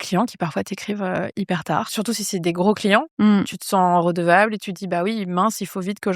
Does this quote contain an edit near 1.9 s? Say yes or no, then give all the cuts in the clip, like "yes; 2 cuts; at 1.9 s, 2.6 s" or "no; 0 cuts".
yes; 1 cut; at 1.9 s